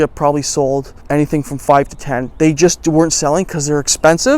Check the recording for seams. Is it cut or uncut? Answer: cut